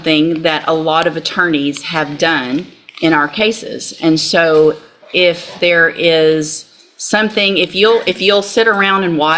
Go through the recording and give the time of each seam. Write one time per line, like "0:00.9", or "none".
none